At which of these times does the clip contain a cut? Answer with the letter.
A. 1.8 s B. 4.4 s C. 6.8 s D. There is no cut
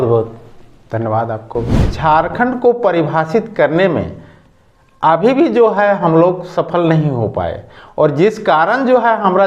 A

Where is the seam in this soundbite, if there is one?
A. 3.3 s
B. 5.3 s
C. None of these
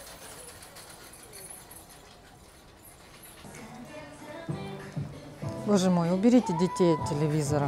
A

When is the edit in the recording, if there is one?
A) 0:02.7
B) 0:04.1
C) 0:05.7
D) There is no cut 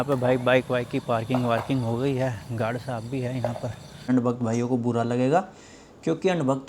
B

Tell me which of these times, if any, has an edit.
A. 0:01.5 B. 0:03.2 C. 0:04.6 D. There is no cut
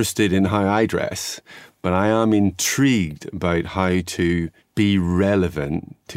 C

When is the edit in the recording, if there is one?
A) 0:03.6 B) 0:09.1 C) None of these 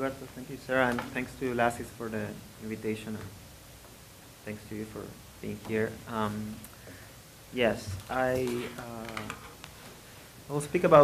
B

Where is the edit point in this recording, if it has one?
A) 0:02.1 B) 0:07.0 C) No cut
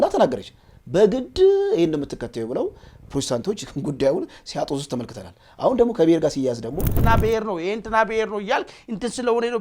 B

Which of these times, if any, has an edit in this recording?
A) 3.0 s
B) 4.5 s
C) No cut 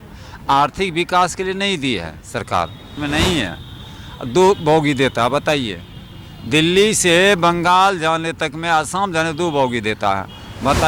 A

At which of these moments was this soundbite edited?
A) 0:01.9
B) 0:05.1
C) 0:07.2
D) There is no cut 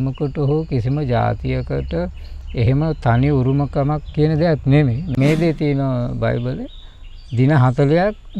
B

